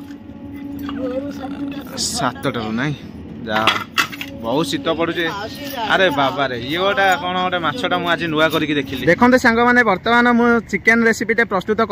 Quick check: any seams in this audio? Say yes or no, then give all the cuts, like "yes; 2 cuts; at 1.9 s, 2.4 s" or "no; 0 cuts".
yes; 1 cut; at 8.9 s